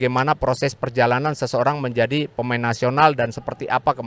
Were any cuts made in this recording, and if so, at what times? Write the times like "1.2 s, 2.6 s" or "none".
none